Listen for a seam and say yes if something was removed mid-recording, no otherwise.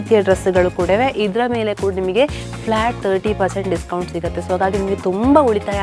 no